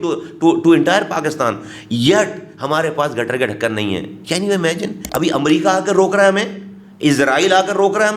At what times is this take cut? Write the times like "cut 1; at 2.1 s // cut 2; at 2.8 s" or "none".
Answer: cut 1; at 5.0 s